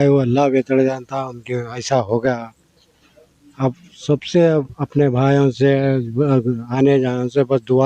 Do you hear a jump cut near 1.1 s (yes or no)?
no